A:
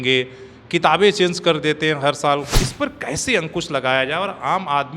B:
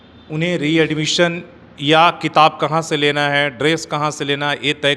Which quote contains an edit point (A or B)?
A